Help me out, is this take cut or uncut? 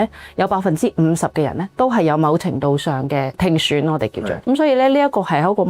cut